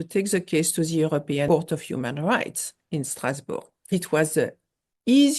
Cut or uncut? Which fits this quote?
cut